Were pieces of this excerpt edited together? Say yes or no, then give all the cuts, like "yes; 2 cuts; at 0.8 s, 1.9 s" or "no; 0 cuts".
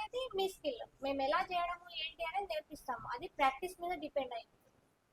no; 0 cuts